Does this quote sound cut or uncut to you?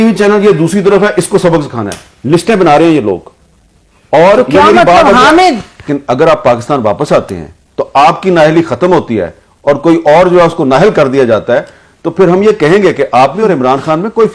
cut